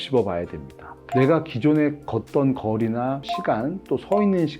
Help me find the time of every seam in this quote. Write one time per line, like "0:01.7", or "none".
0:01.0